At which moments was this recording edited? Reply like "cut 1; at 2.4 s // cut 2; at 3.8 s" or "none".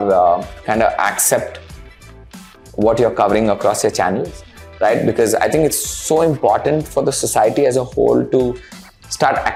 none